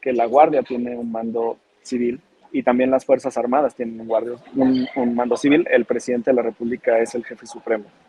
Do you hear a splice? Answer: no; 0 cuts

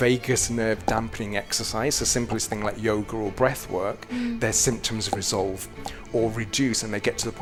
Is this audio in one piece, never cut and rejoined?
yes; 0 cuts

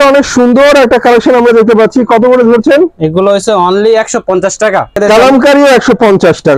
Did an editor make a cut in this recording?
yes; 1 cut; at 5.0 s

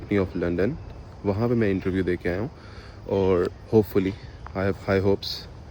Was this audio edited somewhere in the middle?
no; 0 cuts

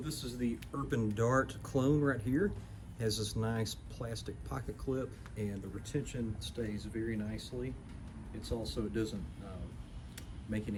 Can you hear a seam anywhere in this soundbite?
no; 0 cuts

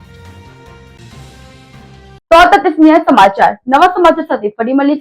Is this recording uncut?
yes; 0 cuts

